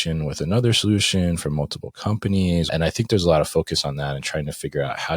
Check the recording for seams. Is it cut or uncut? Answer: cut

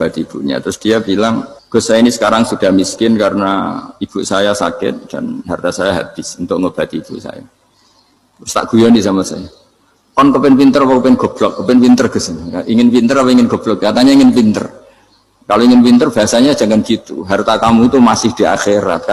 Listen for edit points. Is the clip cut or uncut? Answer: cut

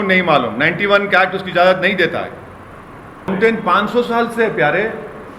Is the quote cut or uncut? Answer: cut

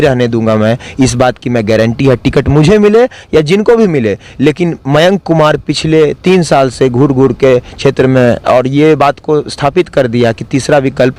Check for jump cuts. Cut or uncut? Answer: uncut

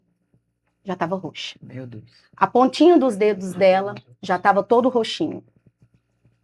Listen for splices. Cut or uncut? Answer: uncut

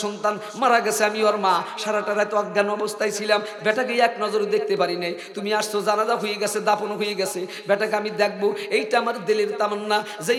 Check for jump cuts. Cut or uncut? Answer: uncut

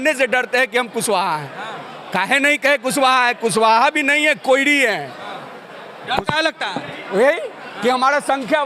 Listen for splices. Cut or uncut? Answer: uncut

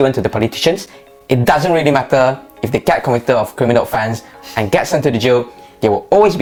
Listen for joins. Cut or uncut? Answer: uncut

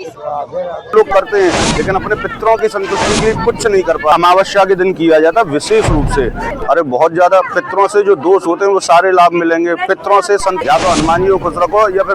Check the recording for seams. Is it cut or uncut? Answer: cut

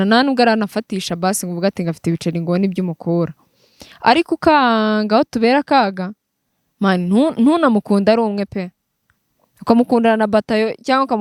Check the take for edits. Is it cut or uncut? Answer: uncut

